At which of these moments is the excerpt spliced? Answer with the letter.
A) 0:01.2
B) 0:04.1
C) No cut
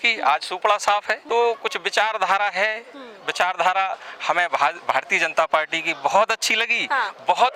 A